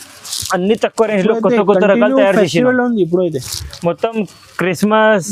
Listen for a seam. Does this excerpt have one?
no; 0 cuts

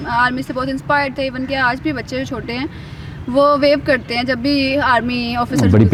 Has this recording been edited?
no; 0 cuts

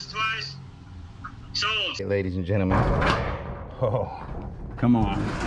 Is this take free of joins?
no; 1 cut; at 2.0 s

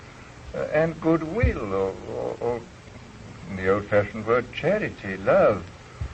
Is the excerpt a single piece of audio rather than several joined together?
yes; 0 cuts

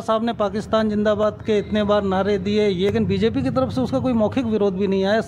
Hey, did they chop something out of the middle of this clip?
yes; 1 cut; at 2.9 s

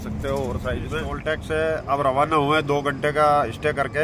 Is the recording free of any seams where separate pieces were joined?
no; 1 cut; at 1.1 s

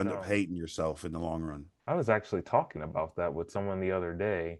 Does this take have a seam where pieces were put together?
no; 0 cuts

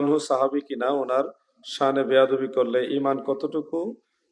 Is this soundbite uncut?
yes; 0 cuts

